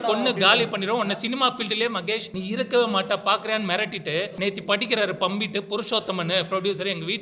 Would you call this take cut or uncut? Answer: cut